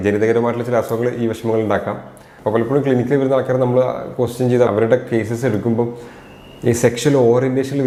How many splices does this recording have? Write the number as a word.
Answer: zero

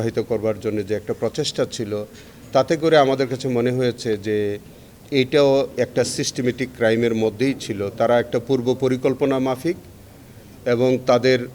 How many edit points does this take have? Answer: zero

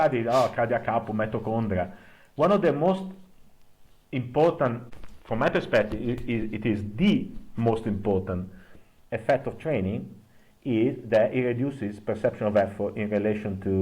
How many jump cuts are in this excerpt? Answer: one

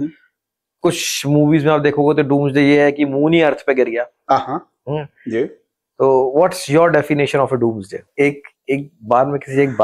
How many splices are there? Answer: one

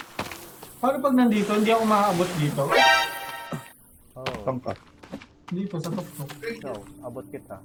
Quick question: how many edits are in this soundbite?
zero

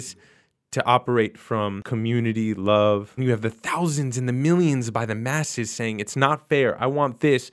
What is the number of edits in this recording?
two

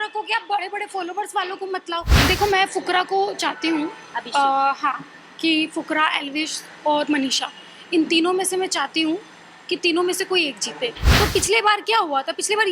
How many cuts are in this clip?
two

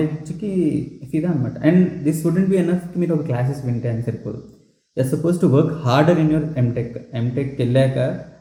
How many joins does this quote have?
zero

